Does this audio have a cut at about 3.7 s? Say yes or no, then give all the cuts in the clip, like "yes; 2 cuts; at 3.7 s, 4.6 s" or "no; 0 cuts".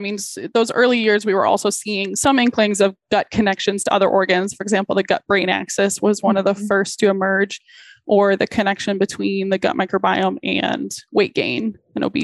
no; 1 cut; at 2.1 s